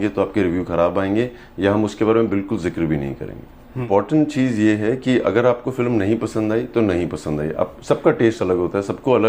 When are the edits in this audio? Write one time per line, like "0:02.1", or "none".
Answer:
0:03.8